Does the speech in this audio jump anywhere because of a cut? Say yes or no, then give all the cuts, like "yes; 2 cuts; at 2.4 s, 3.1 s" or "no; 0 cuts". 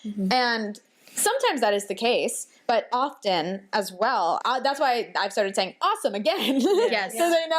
yes; 2 cuts; at 2.9 s, 4.4 s